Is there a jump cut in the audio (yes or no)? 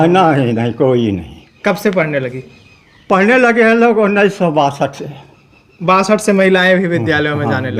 no